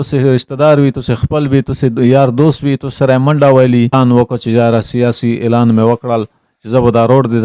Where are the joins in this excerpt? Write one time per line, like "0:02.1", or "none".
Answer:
0:03.9